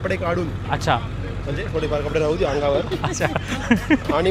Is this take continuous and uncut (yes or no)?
yes